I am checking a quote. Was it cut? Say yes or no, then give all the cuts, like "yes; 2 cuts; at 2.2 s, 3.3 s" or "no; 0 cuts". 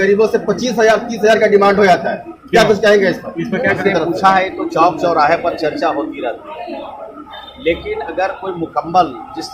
yes; 1 cut; at 3.8 s